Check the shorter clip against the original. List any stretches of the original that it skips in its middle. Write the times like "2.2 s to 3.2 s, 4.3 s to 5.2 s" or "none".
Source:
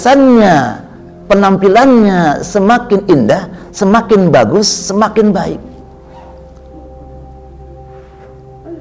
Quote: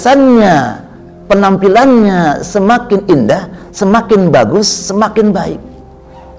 none